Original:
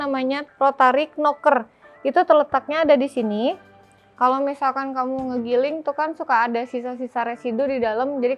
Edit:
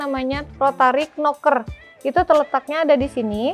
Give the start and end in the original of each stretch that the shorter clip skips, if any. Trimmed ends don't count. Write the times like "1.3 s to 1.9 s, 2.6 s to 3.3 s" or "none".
none

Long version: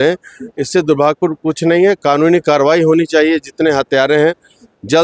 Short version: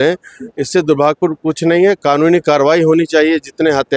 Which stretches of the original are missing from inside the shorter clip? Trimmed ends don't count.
none

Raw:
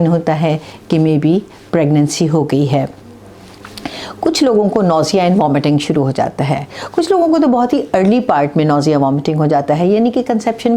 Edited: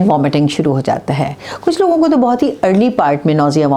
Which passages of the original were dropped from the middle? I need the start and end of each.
none

